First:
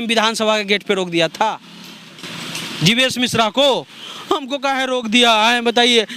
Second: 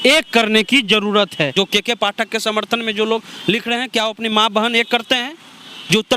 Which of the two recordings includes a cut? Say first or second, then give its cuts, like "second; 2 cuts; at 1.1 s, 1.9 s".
second; 1 cut; at 1.5 s